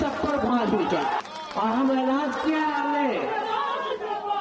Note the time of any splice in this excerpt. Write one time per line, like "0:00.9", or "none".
0:01.2